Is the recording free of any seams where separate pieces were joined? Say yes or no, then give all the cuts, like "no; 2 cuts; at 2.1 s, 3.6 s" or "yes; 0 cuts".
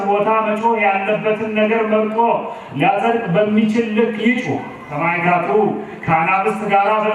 no; 1 cut; at 4.9 s